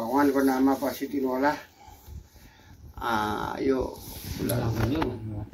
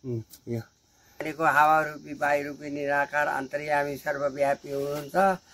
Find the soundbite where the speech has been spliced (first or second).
second